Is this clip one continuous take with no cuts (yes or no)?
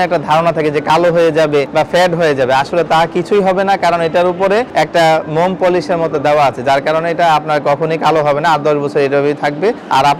yes